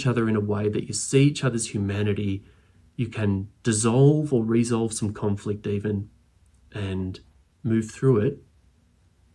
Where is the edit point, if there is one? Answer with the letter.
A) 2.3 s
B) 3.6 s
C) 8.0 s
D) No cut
D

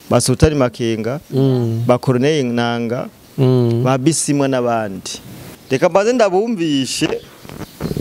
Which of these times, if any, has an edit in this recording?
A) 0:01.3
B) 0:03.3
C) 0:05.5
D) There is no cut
C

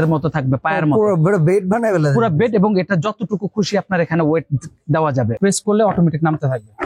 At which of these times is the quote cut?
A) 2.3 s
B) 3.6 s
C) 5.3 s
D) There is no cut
C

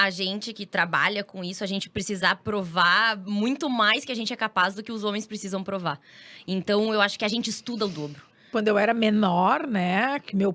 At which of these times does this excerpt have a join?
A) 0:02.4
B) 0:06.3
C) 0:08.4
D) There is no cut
C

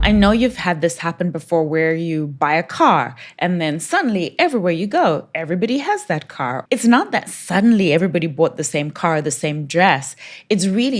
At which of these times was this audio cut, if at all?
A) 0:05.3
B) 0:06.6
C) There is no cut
B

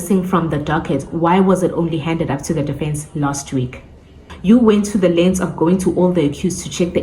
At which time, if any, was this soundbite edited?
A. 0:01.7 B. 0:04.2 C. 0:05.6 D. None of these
B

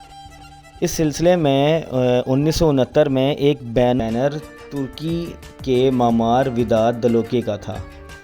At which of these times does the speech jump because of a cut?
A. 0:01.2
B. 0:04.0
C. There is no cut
B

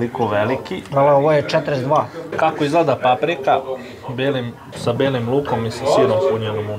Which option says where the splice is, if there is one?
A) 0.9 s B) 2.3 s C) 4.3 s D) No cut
B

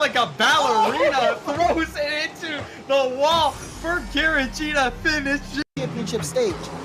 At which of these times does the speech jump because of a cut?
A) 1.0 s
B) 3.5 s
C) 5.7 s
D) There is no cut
C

